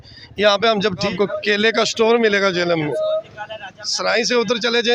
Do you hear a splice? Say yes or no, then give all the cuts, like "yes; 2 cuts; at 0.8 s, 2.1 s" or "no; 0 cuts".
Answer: yes; 1 cut; at 1.1 s